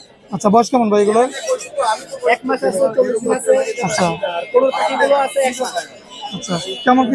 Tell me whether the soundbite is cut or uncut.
uncut